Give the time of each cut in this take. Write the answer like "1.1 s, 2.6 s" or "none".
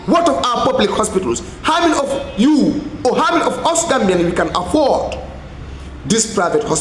none